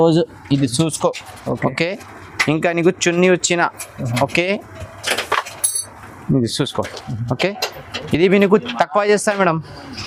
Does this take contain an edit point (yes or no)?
no